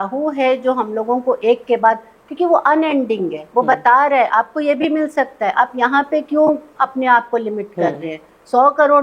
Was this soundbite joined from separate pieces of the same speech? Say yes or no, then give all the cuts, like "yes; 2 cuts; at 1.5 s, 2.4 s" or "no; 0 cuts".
no; 0 cuts